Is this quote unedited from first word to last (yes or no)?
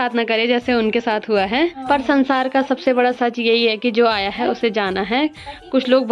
yes